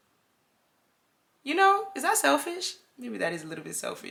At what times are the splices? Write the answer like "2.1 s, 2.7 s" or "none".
none